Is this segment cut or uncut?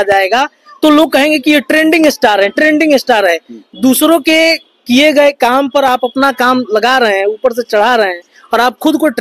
uncut